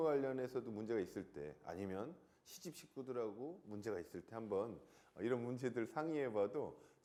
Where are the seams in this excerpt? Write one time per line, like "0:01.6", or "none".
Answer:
none